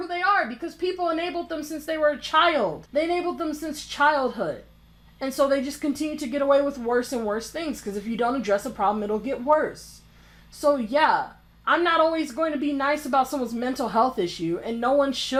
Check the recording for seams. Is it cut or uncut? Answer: uncut